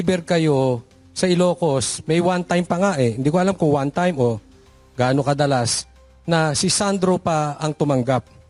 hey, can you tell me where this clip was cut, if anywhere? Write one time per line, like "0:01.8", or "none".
none